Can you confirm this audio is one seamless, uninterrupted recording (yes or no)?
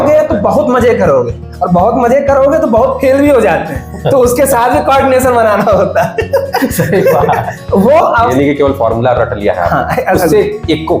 no